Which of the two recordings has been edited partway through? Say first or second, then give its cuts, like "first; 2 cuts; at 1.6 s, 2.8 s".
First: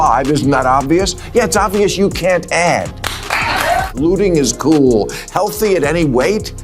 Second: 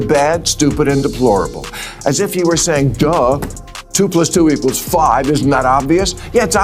first; 1 cut; at 3.9 s